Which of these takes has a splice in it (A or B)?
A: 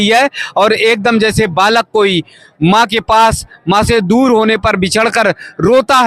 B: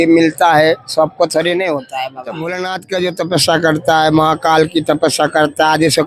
B